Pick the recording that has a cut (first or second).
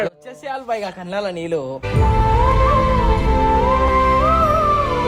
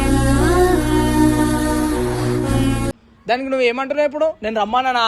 second